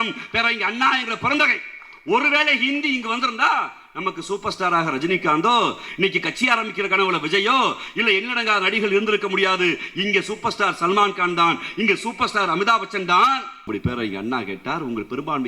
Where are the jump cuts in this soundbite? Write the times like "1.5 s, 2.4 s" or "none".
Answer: 13.7 s